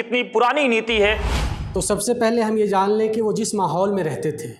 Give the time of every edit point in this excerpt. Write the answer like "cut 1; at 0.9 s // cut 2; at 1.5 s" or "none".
cut 1; at 1.3 s